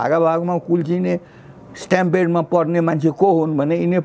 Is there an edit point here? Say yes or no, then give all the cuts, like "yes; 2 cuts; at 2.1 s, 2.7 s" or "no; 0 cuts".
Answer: no; 0 cuts